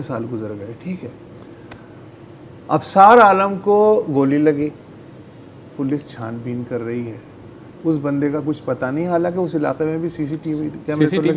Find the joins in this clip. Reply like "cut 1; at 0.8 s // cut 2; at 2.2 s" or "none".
none